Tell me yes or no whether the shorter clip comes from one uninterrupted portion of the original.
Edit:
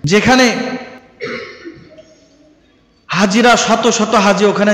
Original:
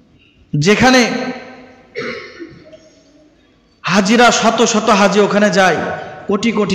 no